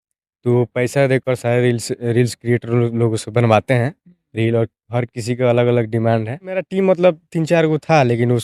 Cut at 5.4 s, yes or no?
no